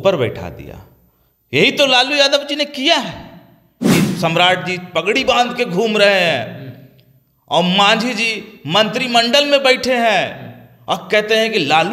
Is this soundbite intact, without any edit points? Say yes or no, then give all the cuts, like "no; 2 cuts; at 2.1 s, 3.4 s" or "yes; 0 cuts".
no; 1 cut; at 4.0 s